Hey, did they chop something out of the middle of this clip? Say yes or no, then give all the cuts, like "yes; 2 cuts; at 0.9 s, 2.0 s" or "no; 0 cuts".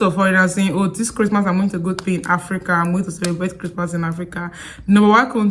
no; 0 cuts